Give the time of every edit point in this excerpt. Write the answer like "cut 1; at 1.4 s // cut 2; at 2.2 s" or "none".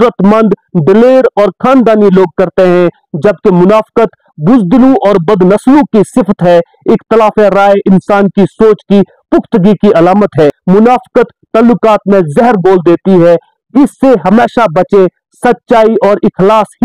cut 1; at 10.6 s